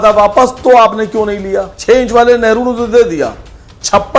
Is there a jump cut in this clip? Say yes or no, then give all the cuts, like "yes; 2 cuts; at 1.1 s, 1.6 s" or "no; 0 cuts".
yes; 1 cut; at 1.7 s